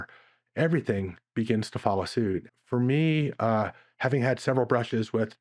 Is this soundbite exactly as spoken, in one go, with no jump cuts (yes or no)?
no